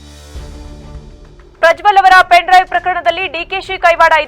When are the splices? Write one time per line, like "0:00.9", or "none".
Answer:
none

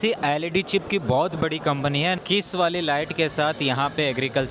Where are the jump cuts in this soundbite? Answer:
0:02.2

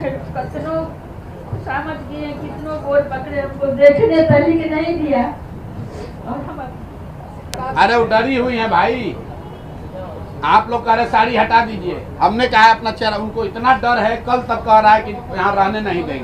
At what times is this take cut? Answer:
0:07.6

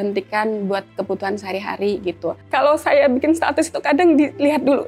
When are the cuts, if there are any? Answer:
0:02.4

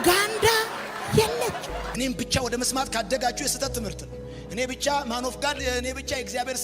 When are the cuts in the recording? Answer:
0:01.9

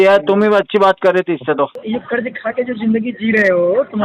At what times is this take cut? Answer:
0:01.8

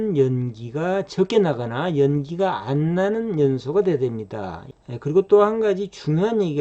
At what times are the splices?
0:04.6

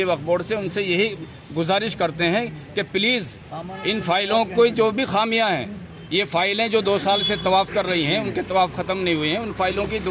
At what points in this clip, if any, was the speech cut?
none

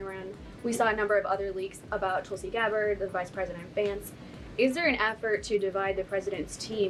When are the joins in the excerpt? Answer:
none

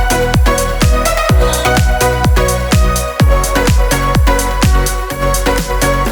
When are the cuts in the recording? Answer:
none

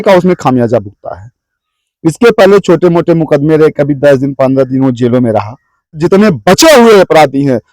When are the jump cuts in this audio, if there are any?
0:05.9

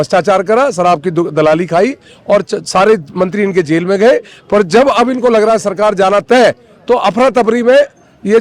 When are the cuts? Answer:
none

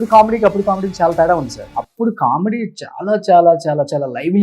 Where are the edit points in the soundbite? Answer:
0:01.6

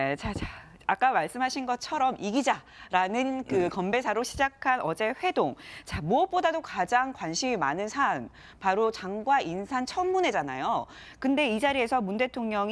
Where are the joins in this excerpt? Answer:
none

